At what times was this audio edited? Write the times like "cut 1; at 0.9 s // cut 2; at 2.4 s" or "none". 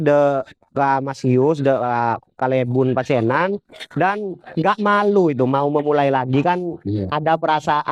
none